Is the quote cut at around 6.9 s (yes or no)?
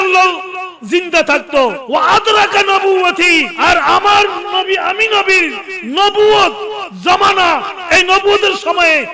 no